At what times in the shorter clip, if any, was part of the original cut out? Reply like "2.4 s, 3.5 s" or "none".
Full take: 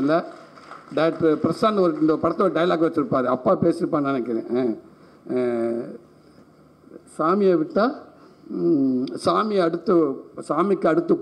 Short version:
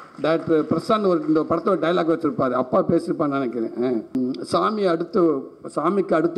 4.1 s